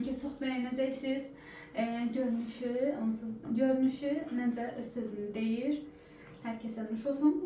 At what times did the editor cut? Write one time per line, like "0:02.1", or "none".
none

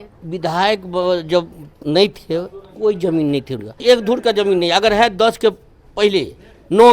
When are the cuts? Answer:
0:03.8

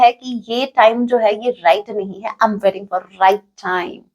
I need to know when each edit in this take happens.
none

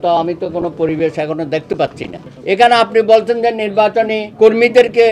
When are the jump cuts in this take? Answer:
0:02.2

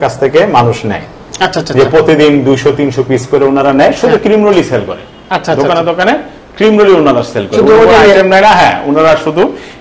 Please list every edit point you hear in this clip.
none

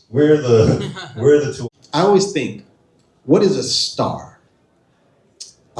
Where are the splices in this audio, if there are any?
0:01.6

